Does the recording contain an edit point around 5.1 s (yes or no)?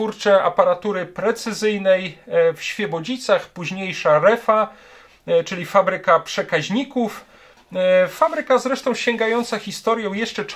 no